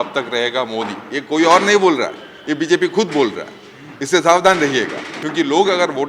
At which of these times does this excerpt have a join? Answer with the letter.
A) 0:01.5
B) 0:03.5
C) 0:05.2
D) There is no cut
C